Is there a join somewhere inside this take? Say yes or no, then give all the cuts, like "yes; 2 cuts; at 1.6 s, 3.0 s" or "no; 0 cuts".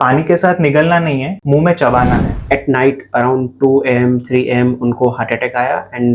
yes; 2 cuts; at 1.3 s, 2.4 s